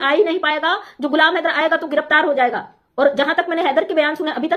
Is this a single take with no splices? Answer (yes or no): yes